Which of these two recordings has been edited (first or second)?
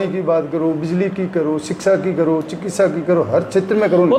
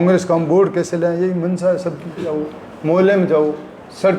second